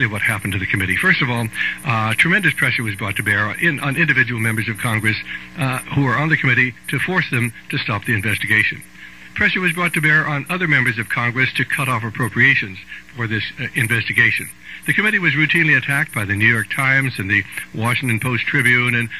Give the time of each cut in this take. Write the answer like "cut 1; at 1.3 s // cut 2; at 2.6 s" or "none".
cut 1; at 7.6 s